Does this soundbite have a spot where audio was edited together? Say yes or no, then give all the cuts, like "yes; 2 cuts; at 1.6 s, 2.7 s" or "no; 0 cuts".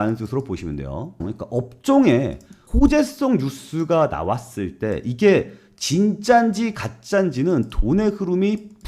yes; 1 cut; at 1.2 s